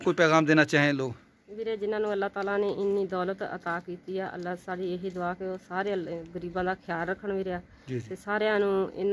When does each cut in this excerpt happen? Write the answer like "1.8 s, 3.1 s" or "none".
none